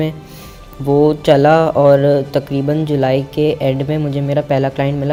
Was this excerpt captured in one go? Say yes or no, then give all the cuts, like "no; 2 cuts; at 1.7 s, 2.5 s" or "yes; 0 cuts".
yes; 0 cuts